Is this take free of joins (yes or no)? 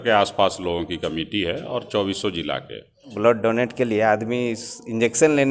no